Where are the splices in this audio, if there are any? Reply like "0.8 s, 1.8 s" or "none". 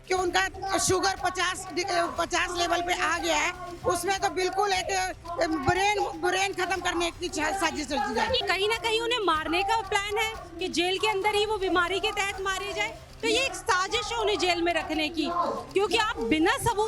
8.4 s